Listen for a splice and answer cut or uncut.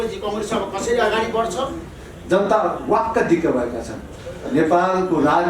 cut